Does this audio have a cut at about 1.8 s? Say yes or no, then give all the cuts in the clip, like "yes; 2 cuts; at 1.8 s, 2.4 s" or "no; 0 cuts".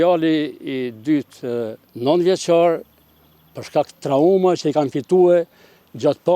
yes; 1 cut; at 1.8 s